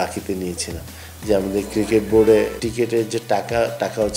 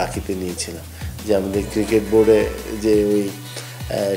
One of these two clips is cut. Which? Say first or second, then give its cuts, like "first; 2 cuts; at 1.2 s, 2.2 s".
first; 1 cut; at 2.6 s